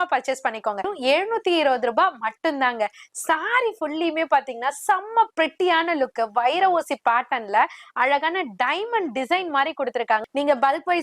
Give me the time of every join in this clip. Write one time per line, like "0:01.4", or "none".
0:00.9
0:10.2

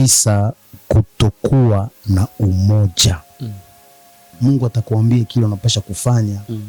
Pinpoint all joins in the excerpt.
0:04.3

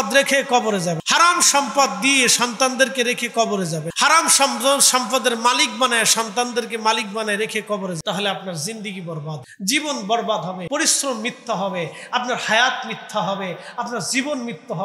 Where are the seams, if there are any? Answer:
0:01.0
0:03.9
0:08.0
0:09.5
0:10.6

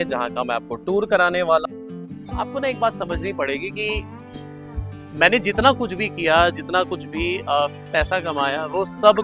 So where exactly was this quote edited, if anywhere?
0:01.7

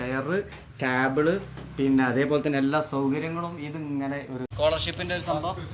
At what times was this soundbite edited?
0:04.5

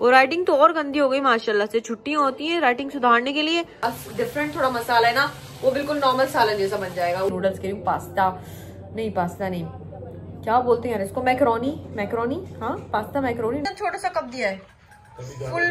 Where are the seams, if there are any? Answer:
0:03.8
0:07.3
0:13.6

